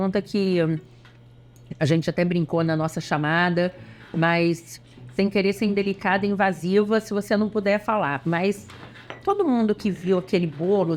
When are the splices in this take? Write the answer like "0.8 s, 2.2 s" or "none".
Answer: none